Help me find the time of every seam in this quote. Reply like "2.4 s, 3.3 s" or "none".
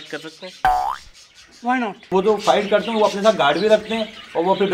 2.1 s